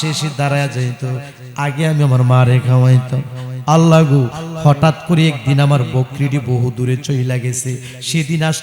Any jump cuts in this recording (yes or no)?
no